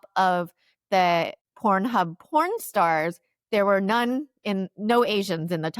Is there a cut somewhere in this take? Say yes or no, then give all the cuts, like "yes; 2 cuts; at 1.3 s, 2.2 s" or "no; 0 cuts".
yes; 1 cut; at 1.4 s